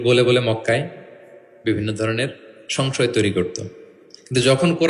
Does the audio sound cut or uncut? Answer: uncut